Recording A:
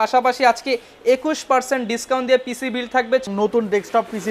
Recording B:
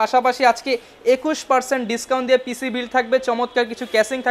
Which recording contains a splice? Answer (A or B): A